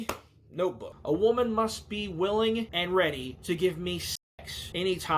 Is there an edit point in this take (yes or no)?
yes